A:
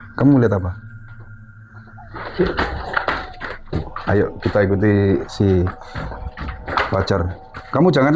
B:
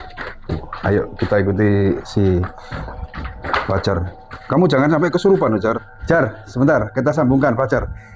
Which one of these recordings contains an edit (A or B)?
B